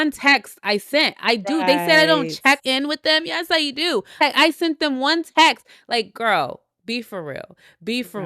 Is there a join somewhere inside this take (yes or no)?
no